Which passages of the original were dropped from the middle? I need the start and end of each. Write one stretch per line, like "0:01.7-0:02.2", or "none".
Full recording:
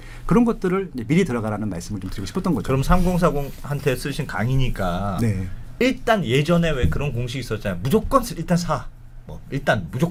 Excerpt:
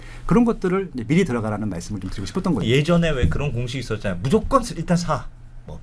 0:02.6-0:06.2